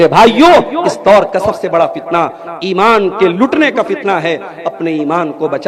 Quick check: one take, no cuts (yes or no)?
yes